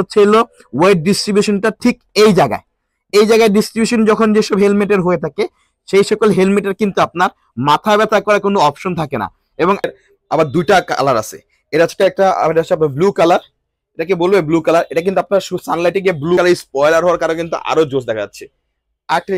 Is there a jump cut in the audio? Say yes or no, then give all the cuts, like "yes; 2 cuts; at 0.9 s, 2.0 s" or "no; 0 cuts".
yes; 2 cuts; at 9.9 s, 16.4 s